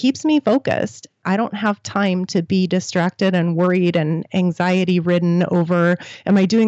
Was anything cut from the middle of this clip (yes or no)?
yes